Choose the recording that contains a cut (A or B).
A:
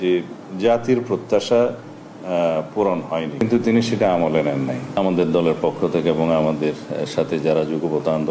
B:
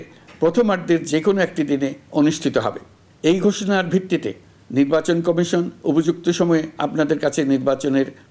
A